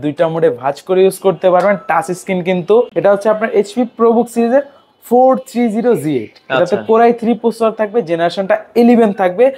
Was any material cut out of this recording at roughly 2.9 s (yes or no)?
yes